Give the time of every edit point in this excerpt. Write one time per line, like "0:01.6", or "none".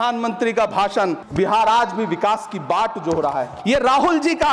0:01.2
0:03.5